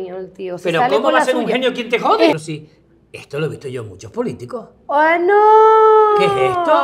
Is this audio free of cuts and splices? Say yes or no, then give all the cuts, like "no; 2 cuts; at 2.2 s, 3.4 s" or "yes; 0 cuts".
no; 1 cut; at 2.3 s